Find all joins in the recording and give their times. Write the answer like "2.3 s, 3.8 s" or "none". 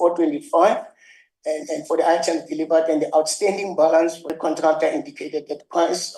4.3 s